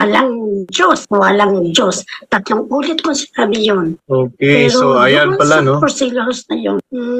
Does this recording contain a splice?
no; 0 cuts

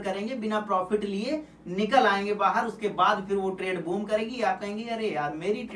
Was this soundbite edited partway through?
no; 0 cuts

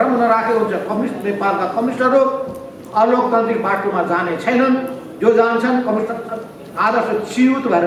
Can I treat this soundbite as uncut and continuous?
yes; 0 cuts

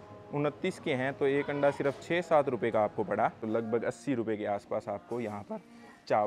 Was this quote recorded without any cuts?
no; 1 cut; at 3.4 s

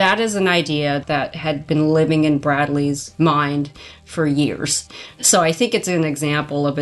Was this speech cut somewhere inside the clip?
yes; 3 cuts; at 1.0 s, 3.1 s, 4.9 s

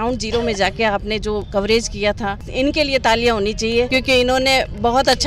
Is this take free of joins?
no; 1 cut; at 2.4 s

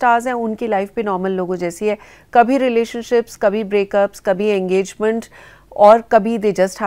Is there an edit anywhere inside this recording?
no; 0 cuts

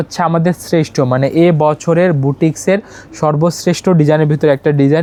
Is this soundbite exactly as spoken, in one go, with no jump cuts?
yes; 0 cuts

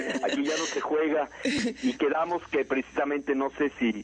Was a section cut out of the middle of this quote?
yes; 1 cut; at 0.9 s

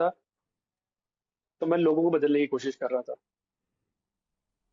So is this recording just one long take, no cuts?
yes; 0 cuts

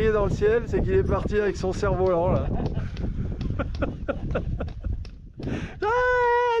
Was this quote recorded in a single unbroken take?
yes; 0 cuts

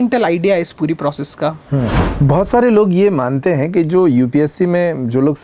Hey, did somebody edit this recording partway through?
yes; 1 cut; at 2.0 s

